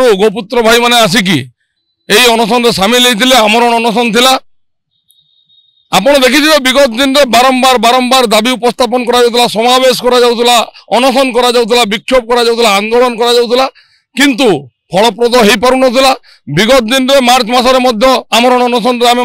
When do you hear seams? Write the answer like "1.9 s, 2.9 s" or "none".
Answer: none